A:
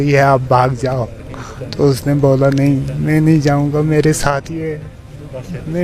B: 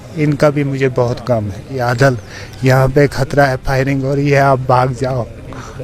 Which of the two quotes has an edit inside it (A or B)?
B